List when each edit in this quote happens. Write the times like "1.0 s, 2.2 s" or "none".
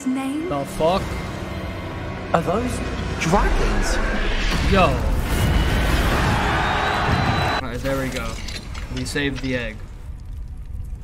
7.6 s